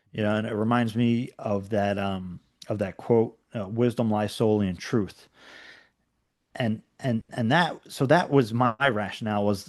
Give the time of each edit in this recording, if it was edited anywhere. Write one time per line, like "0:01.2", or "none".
none